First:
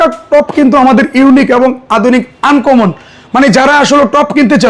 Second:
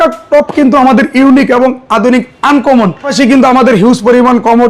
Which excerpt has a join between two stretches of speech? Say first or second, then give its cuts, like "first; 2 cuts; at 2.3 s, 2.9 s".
second; 1 cut; at 3.1 s